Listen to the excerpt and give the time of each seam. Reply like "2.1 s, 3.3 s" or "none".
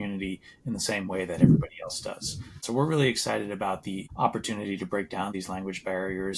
2.5 s, 4.1 s, 5.3 s